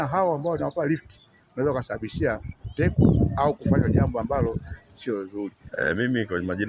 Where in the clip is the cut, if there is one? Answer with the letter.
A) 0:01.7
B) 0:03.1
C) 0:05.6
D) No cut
D